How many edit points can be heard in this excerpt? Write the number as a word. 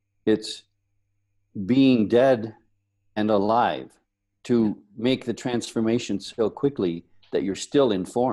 zero